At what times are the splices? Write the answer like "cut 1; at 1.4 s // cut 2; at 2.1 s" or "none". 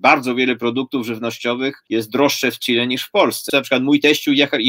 cut 1; at 1.8 s // cut 2; at 3.5 s